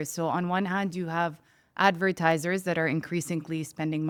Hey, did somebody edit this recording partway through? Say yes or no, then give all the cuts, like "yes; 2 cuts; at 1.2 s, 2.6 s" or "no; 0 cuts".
no; 0 cuts